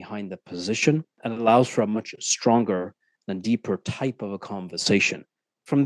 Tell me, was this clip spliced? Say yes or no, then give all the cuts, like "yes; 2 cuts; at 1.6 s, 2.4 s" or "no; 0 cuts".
yes; 1 cut; at 1.2 s